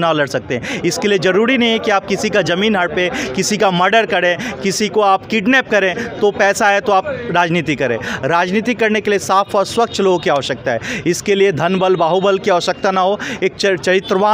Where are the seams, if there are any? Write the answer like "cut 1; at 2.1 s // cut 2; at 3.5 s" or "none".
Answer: none